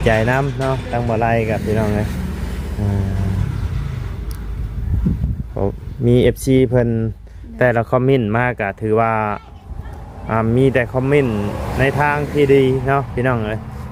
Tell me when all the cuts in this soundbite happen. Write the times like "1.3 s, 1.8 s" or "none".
none